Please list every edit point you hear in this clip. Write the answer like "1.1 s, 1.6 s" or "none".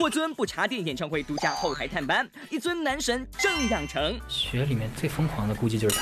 none